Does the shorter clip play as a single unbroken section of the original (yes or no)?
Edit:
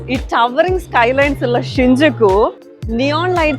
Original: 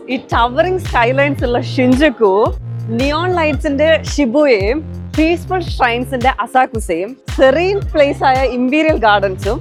yes